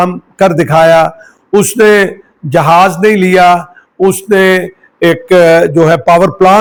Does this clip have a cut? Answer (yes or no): no